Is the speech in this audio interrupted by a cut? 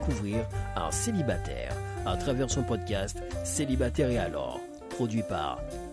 no; 0 cuts

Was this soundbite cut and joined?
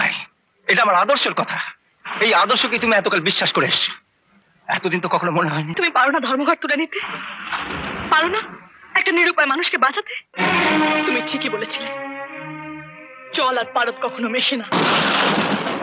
yes; 2 cuts; at 5.7 s, 10.2 s

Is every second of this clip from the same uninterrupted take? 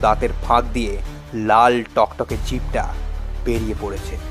yes; 0 cuts

